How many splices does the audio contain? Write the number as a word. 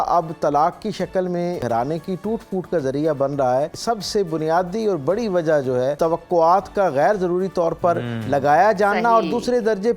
three